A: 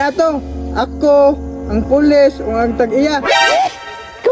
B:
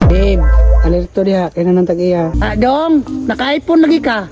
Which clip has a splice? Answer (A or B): B